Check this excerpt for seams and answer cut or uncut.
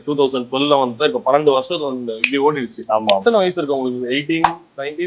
cut